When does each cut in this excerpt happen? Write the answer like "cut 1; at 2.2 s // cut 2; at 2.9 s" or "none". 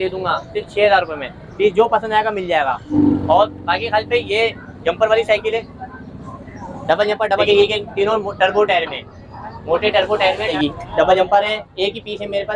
cut 1; at 2.9 s // cut 2; at 7.4 s // cut 3; at 10.5 s